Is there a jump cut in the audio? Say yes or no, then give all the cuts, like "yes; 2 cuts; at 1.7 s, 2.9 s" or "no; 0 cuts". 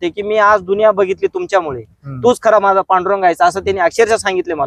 no; 0 cuts